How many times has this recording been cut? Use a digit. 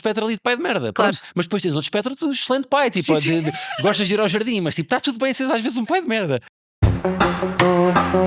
1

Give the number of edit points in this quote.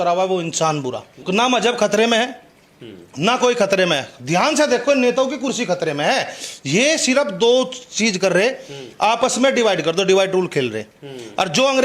0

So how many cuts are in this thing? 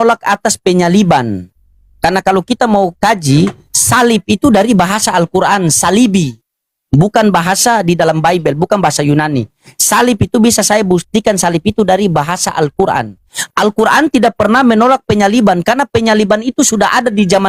0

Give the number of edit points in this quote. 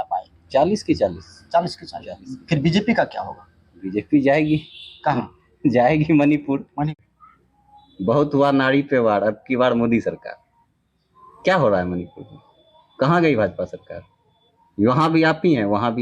1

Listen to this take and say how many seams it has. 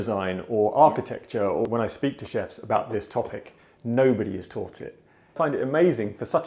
2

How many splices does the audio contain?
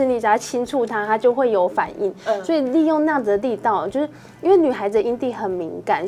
0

